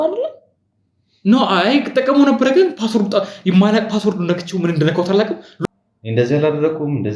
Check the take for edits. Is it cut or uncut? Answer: cut